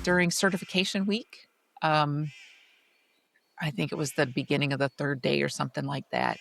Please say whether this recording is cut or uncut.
uncut